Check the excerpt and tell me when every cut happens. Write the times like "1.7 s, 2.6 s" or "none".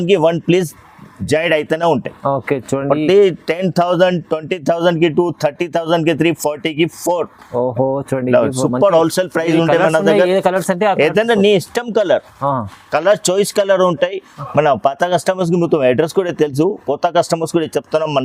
none